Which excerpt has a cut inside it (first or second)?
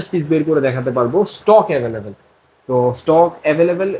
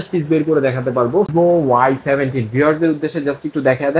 second